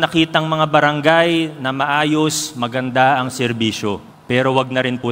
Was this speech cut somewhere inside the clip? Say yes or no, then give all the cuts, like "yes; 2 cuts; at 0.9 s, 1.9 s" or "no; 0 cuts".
yes; 1 cut; at 4.1 s